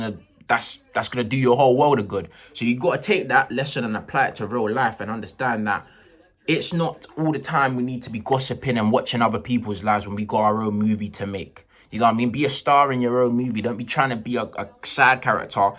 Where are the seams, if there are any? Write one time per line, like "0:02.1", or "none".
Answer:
none